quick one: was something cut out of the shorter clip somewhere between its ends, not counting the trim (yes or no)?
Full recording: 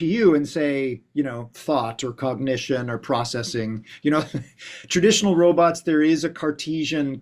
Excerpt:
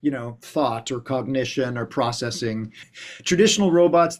yes